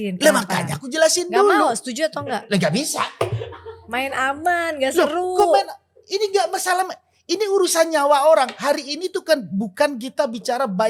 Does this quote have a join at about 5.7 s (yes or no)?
no